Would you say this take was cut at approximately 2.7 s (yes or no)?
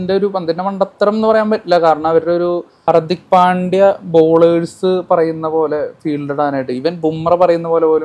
yes